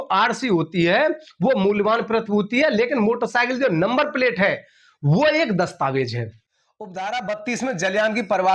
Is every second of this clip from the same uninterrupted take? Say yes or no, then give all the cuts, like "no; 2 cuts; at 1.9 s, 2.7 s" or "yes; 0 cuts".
yes; 0 cuts